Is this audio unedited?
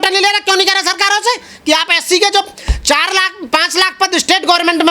yes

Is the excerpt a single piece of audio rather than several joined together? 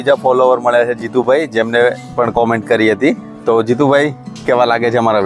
no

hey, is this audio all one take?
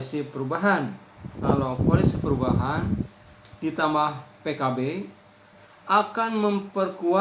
no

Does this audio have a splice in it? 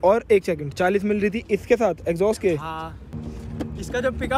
yes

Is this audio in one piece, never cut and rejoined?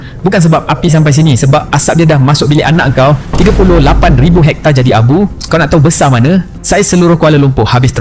yes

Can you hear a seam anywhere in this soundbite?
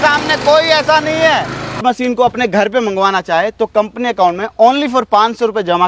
yes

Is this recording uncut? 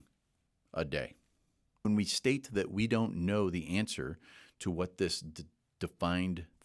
no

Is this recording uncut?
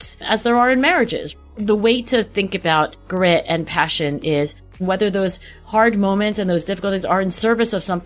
no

